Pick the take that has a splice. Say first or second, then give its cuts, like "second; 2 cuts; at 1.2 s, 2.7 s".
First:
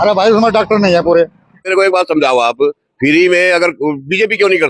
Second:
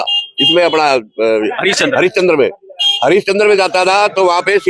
first; 1 cut; at 1.7 s